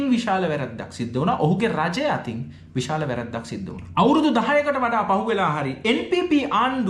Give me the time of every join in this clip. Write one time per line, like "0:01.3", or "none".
0:03.8